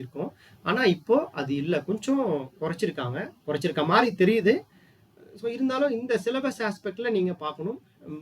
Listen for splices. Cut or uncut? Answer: uncut